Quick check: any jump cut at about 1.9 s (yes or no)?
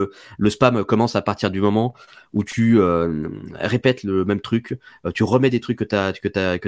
no